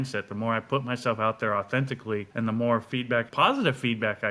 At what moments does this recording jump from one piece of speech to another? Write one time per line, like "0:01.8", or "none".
0:02.3
0:03.3